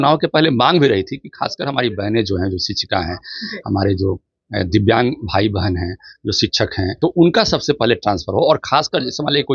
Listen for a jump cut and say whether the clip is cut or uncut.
cut